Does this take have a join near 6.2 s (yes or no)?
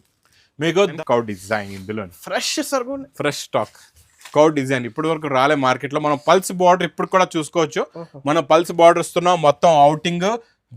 no